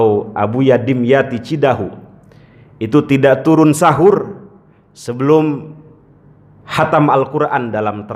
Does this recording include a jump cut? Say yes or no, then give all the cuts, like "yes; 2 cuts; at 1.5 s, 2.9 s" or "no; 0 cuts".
no; 0 cuts